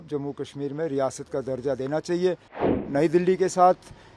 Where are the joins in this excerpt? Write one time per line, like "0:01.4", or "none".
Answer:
0:02.7